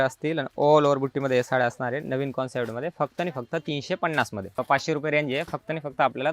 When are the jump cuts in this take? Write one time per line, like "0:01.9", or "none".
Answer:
0:04.6

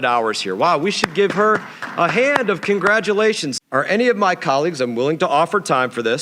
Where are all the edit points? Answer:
0:03.5

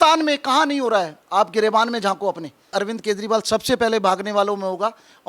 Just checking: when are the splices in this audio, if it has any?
0:02.7

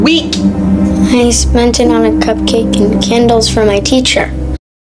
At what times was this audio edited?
none

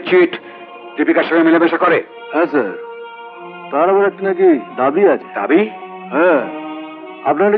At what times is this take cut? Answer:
none

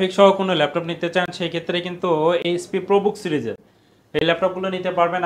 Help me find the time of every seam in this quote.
none

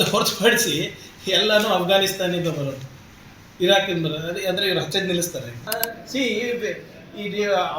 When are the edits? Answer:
0:05.6

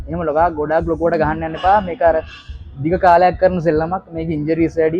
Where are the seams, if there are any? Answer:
none

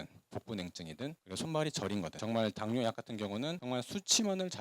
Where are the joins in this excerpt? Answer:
0:02.2

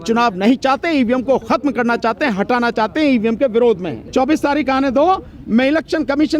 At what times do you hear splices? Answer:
0:03.9

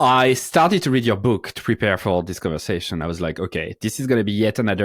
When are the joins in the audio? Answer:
none

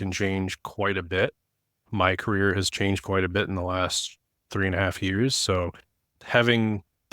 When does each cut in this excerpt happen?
0:01.9
0:06.1

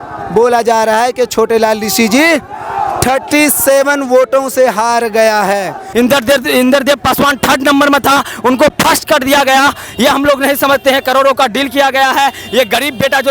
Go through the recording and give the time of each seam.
0:05.8

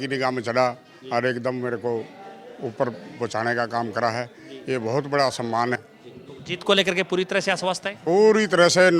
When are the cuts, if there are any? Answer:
0:05.8

